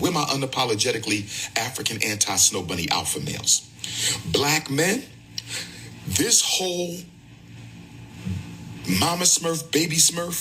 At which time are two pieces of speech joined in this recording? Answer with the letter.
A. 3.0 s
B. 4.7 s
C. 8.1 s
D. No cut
D